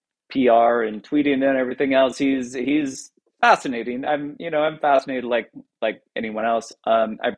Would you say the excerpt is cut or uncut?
uncut